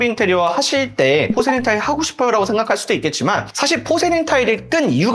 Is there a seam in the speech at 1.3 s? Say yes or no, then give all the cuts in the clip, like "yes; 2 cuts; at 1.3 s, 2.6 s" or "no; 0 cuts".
yes; 1 cut; at 1.3 s